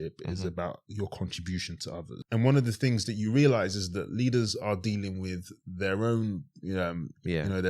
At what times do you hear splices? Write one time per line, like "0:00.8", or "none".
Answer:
0:02.1